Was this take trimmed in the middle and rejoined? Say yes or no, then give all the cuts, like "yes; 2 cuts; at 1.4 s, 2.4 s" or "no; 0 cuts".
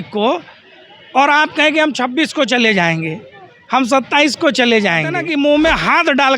yes; 1 cut; at 5.2 s